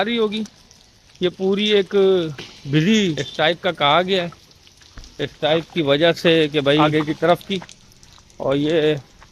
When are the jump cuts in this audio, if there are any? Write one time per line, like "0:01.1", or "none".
0:03.2
0:06.9